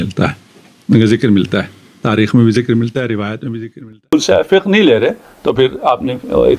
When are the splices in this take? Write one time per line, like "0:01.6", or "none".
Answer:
0:03.9